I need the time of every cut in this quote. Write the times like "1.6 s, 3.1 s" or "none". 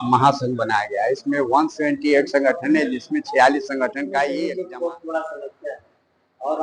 4.4 s